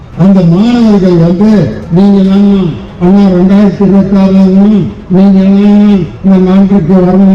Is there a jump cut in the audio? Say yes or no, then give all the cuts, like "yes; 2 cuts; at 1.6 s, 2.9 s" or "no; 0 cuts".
no; 0 cuts